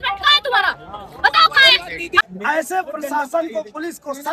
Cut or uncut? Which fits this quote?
cut